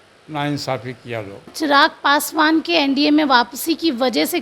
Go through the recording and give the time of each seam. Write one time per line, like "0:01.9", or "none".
0:01.5